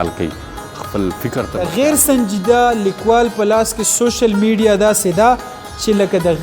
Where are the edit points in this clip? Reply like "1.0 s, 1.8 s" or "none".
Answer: 1.5 s